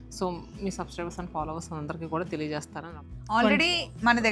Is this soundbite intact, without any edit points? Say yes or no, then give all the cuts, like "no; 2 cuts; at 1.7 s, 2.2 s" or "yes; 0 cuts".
no; 1 cut; at 2.8 s